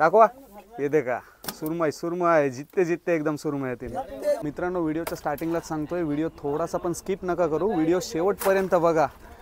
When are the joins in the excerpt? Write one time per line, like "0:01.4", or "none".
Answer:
0:04.4